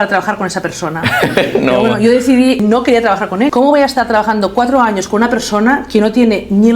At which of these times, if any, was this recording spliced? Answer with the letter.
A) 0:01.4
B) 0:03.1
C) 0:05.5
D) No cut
B